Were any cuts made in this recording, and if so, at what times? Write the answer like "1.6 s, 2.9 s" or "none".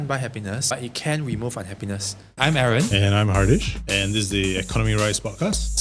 0.7 s, 2.3 s